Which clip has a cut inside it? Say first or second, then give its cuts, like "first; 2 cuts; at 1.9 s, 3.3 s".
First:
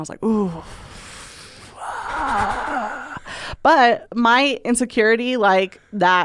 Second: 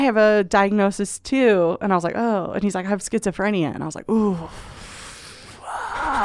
first; 1 cut; at 4.1 s